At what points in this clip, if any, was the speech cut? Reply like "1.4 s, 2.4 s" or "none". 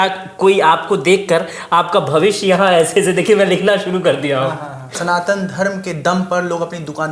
5.0 s